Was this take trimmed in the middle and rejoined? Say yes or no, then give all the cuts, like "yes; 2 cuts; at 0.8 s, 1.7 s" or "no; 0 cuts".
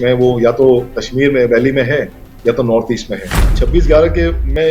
yes; 1 cut; at 3.6 s